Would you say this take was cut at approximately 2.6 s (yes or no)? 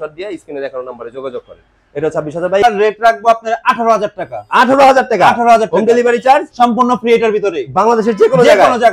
yes